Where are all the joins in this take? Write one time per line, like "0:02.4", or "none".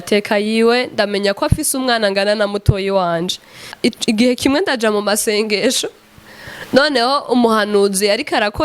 0:03.7